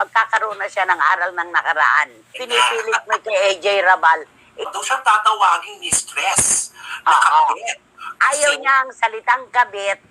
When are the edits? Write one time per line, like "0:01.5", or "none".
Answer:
0:02.3
0:04.7